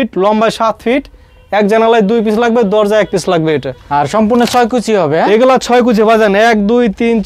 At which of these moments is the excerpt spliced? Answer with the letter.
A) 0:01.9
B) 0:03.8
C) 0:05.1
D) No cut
D